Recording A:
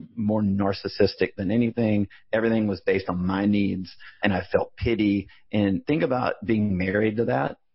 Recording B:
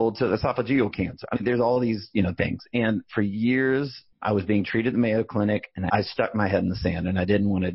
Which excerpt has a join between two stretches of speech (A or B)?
B